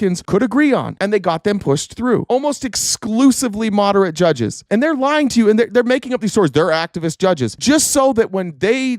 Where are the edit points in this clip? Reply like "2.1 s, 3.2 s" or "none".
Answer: 2.2 s